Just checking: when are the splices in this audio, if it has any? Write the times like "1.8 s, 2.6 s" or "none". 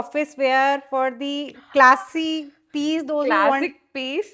none